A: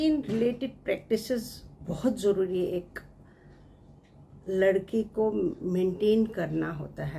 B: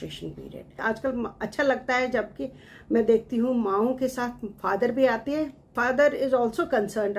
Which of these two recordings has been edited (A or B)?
B